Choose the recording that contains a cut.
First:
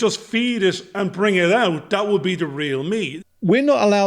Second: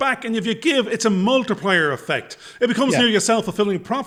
first; 1 cut; at 3.1 s

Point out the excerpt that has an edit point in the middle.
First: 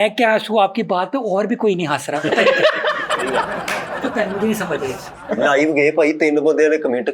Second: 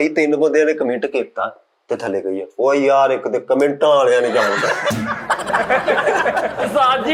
first; 1 cut; at 5.0 s

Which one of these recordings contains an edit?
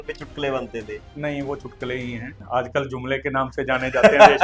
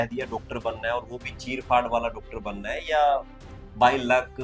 first; 1 cut; at 2.3 s

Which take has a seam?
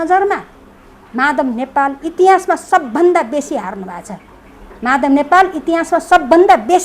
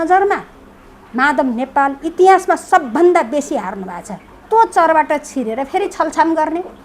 second; 1 cut; at 4.4 s

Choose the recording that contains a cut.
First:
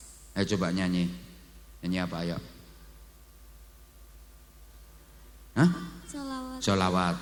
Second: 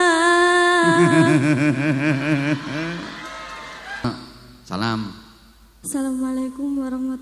second; 1 cut; at 4.0 s

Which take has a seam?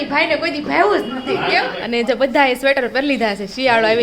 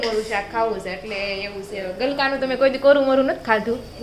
first; 1 cut; at 1.8 s

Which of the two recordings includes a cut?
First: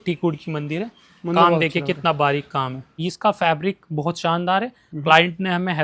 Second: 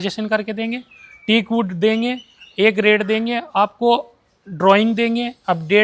first; 1 cut; at 3.0 s

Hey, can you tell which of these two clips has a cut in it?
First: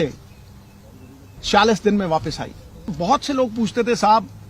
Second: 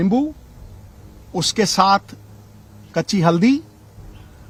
first; 1 cut; at 2.9 s

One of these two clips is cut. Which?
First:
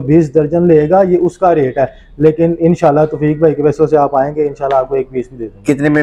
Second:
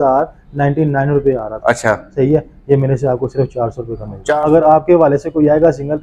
second; 1 cut; at 4.3 s

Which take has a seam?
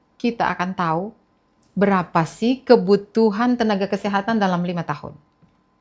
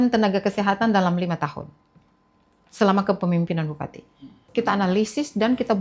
second; 1 cut; at 4.4 s

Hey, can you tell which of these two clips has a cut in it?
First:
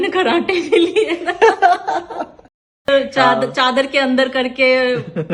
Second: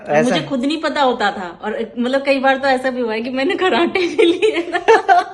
first; 1 cut; at 2.9 s

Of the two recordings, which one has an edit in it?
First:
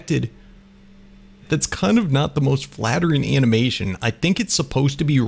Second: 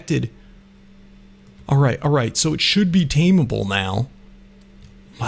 first; 1 cut; at 1.4 s

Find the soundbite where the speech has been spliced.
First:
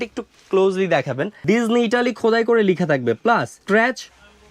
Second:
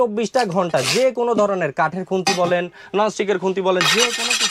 first; 2 cuts; at 1.4 s, 3.6 s

